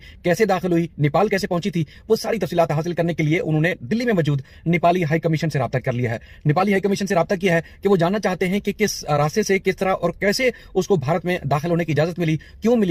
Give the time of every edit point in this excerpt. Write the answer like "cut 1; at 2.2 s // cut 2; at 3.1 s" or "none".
none